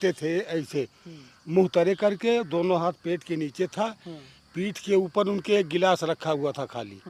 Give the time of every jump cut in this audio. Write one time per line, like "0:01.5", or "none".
none

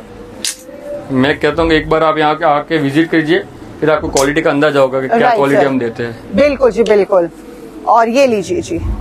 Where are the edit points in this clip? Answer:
none

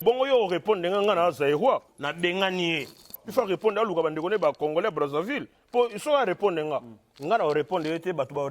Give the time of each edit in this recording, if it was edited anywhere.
0:01.9

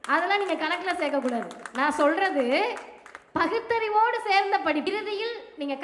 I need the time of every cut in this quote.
0:04.9

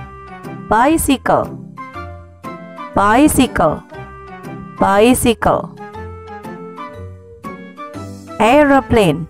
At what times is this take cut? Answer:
none

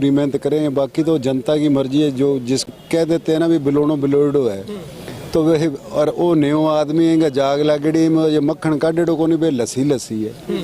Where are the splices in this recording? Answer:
0:02.7

